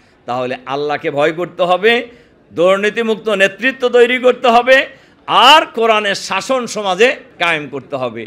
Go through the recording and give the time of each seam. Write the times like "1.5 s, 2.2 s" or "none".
7.3 s